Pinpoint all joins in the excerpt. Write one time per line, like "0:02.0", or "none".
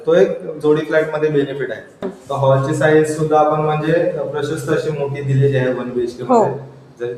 0:02.2